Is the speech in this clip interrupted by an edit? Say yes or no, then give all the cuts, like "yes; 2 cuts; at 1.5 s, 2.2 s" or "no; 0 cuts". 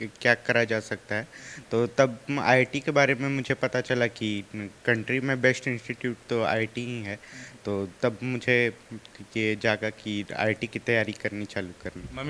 no; 0 cuts